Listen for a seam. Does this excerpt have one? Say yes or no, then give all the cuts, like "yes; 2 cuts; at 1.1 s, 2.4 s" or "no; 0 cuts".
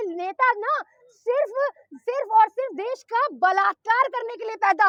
no; 0 cuts